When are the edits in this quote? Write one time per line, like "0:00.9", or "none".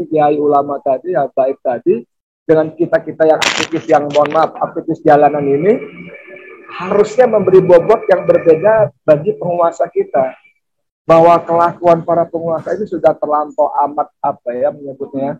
none